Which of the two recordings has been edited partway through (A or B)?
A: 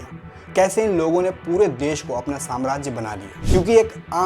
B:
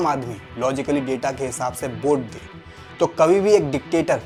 A